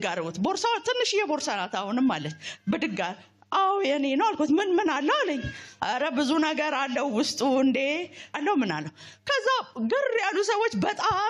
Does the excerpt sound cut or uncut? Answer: cut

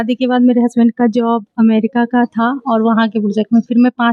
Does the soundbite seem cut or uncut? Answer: uncut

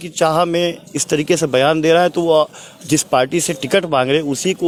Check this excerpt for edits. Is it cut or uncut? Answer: uncut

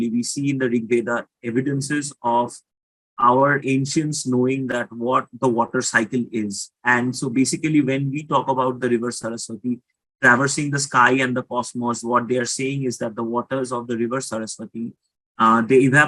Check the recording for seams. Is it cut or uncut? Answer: uncut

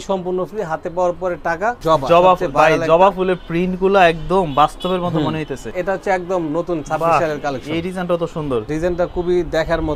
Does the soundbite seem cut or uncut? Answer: cut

